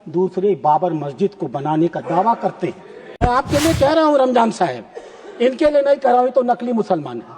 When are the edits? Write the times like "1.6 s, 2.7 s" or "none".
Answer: 3.2 s